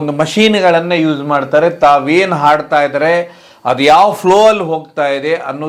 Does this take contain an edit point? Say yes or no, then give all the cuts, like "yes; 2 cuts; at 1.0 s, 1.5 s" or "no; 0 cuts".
no; 0 cuts